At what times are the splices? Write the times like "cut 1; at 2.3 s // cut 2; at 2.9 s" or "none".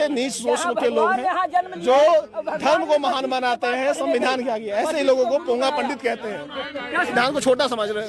cut 1; at 7.1 s